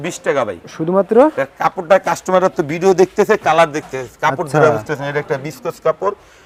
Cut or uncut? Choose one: uncut